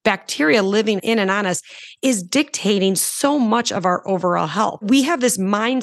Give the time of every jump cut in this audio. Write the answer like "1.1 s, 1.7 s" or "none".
1.0 s, 4.8 s

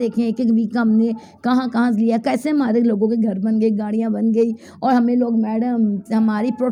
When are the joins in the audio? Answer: none

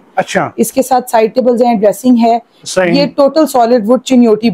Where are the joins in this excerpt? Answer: none

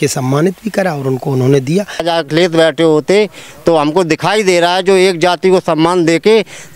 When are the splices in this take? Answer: 2.0 s

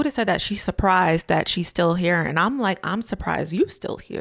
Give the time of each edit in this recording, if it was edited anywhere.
none

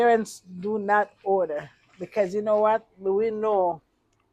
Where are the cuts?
none

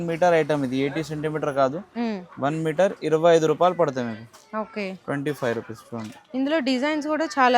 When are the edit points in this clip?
none

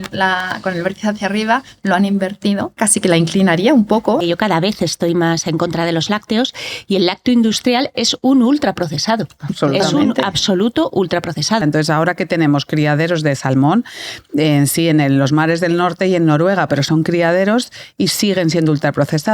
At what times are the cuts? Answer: 2.8 s, 4.2 s, 11.6 s

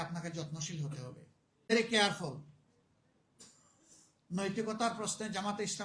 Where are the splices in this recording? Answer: 1.7 s

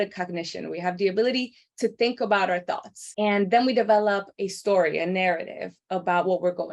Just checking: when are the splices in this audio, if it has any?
3.0 s

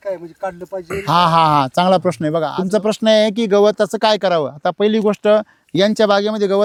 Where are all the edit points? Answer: none

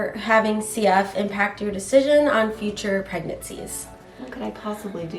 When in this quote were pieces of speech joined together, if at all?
4.1 s

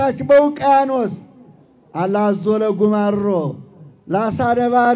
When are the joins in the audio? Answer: none

